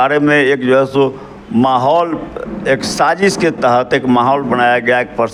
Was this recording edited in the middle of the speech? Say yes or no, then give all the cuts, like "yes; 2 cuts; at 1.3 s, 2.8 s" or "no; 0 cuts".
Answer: no; 0 cuts